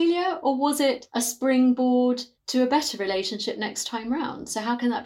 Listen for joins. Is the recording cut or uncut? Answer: cut